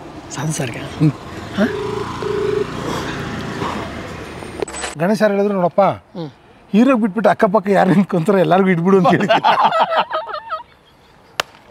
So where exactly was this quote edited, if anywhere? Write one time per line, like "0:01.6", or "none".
0:04.6